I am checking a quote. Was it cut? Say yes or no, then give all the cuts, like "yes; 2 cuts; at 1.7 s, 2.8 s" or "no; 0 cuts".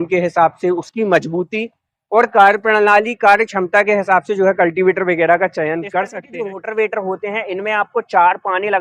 yes; 1 cut; at 6.3 s